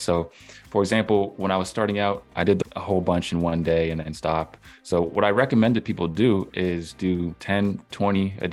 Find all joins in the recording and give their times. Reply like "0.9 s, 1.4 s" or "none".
2.6 s, 7.3 s